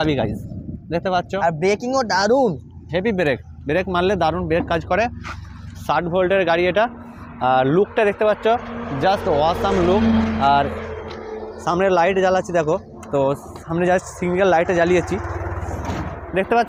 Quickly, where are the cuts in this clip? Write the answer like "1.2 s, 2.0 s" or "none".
none

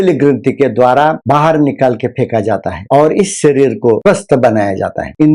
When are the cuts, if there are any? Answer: 4.0 s

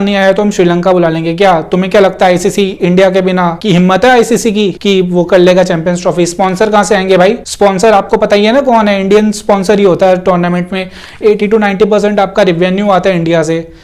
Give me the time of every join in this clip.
3.6 s, 4.8 s, 7.5 s, 11.2 s

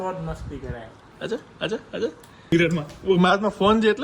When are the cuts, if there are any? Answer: 1.1 s, 2.5 s

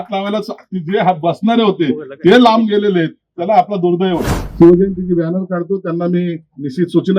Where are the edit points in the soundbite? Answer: 4.4 s

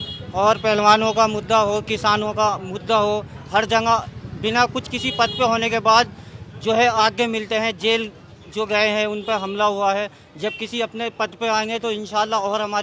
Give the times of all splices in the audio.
none

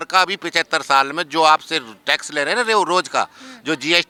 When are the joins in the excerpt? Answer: none

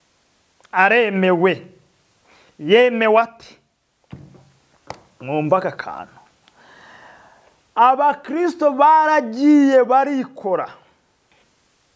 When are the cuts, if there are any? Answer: none

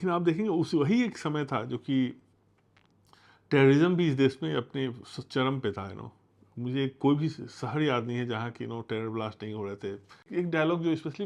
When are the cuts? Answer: 10.3 s

